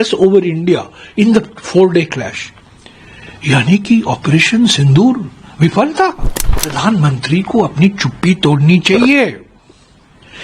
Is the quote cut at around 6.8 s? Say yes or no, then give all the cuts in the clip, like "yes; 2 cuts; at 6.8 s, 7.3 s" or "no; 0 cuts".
yes; 1 cut; at 6.8 s